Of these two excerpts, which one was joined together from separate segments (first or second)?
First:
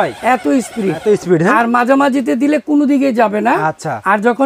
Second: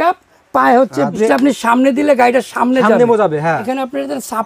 second